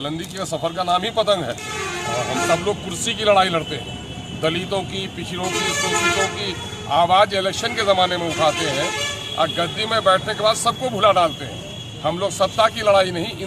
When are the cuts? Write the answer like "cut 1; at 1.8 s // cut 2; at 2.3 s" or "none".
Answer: cut 1; at 2.4 s